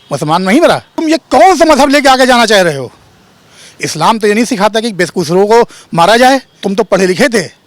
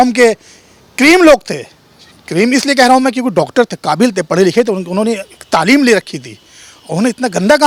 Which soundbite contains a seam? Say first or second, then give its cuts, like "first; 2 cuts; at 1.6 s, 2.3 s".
first; 2 cuts; at 1.0 s, 6.5 s